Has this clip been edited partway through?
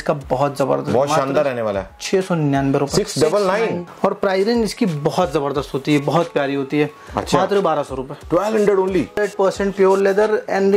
yes; 2 cuts; at 3.8 s, 9.2 s

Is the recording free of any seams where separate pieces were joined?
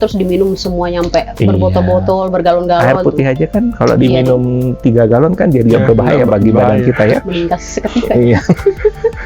yes; 0 cuts

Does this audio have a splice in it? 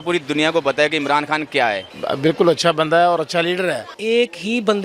yes; 2 cuts; at 1.9 s, 3.9 s

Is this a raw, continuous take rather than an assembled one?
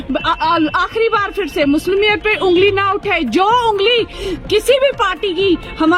yes; 0 cuts

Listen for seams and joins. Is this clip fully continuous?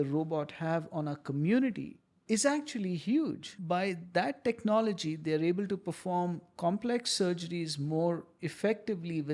no; 1 cut; at 3.4 s

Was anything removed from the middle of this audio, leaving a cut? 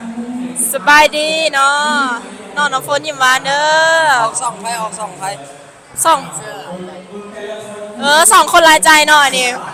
no; 0 cuts

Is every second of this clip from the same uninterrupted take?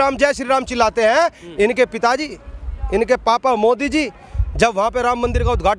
yes; 0 cuts

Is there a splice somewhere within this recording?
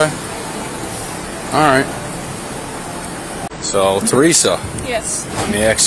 yes; 1 cut; at 3.5 s

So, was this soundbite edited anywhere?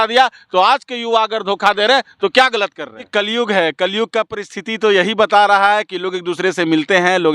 yes; 1 cut; at 3.1 s

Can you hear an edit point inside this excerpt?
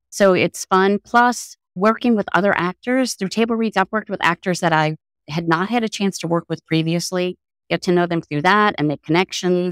no; 0 cuts

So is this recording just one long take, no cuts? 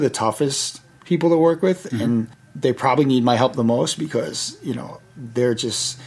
no; 1 cut; at 2.4 s

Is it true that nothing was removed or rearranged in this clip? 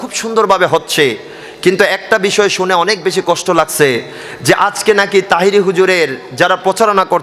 yes; 0 cuts

